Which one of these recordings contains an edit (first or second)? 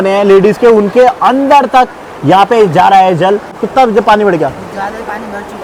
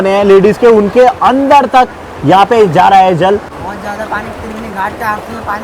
second